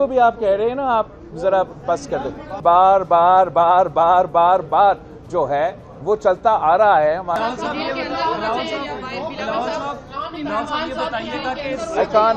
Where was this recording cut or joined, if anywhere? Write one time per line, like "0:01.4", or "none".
0:02.5
0:07.4